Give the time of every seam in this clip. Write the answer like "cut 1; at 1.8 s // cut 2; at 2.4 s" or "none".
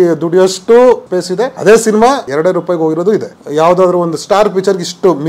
cut 1; at 1.2 s // cut 2; at 2.3 s // cut 3; at 3.4 s